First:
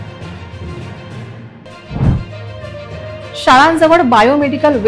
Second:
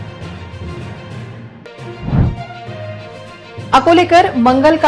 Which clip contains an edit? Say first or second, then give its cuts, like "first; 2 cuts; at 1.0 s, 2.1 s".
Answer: second; 1 cut; at 1.5 s